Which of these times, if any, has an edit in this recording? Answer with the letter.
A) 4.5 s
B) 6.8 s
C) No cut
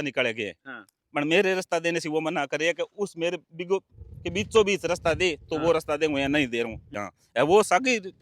B